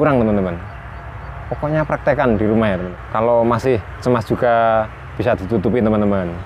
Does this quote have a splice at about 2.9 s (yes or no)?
yes